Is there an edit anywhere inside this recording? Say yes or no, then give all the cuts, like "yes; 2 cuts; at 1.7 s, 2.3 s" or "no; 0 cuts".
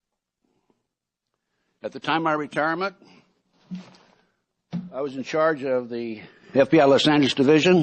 no; 0 cuts